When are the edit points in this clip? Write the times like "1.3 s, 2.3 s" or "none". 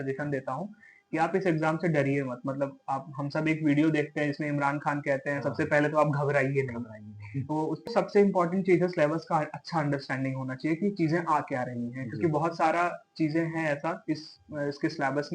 7.9 s